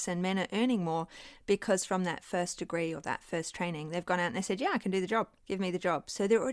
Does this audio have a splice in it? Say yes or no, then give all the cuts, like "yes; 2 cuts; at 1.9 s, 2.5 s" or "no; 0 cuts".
yes; 1 cut; at 5.4 s